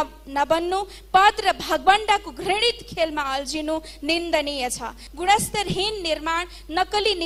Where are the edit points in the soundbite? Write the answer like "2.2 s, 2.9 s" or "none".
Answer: 5.0 s